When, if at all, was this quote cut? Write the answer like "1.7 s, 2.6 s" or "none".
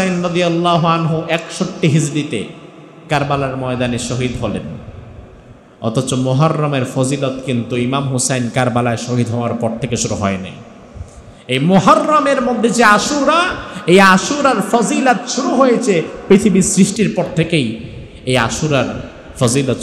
16.9 s